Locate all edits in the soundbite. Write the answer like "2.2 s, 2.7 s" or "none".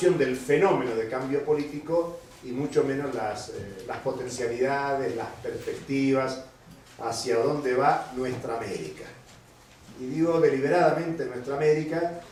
none

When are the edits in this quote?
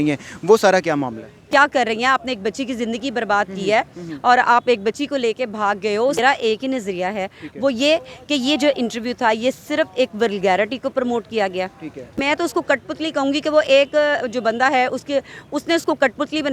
1.5 s, 6.2 s, 12.2 s

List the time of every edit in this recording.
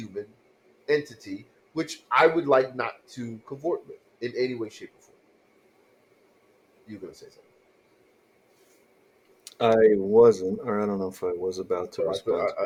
none

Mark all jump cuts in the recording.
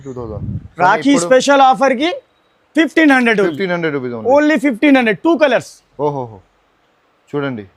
none

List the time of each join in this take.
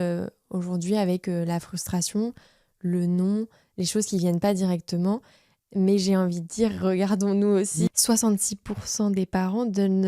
7.9 s

